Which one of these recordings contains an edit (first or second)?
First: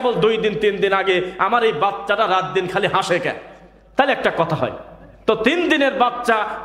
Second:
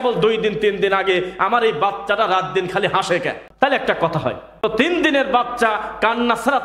second